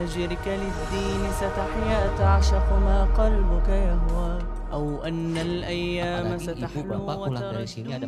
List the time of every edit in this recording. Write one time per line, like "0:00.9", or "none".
none